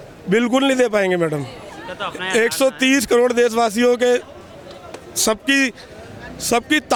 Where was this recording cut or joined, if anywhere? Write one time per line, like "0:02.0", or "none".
none